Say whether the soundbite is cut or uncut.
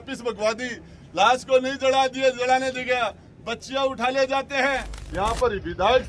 cut